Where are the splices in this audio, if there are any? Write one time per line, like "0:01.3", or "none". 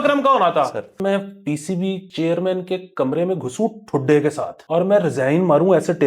0:01.0
0:02.1
0:04.5